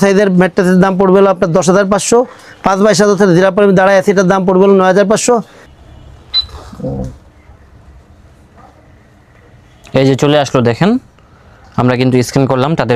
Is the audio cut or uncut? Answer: cut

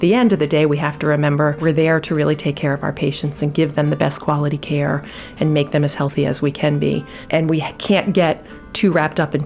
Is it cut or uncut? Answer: cut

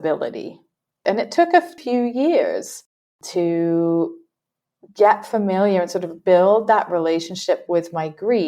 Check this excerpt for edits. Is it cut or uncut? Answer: cut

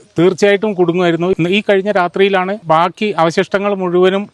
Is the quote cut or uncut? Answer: cut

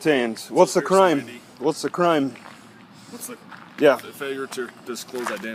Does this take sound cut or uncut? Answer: uncut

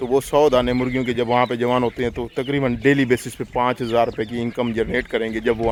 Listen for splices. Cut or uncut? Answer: uncut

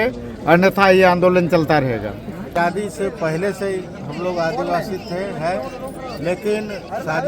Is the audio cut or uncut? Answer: cut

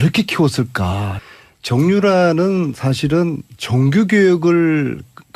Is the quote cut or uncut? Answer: uncut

